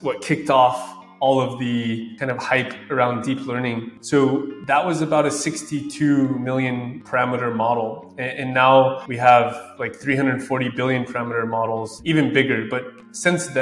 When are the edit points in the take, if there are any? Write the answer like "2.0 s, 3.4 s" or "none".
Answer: 11.9 s

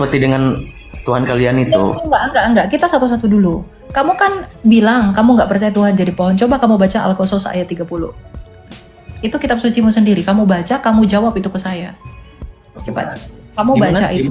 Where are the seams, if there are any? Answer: none

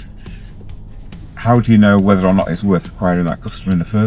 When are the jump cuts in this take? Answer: none

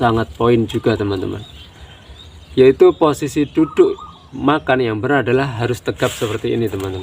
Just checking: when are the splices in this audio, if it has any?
none

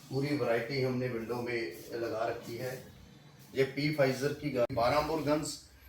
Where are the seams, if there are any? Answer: 4.7 s

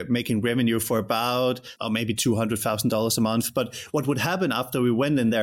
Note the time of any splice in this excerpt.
1.7 s

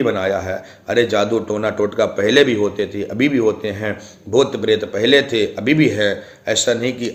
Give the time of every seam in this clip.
none

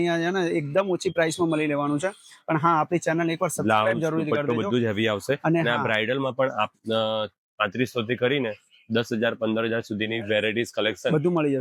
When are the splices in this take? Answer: none

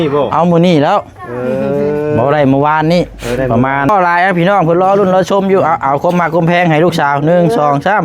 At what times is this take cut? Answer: 3.9 s

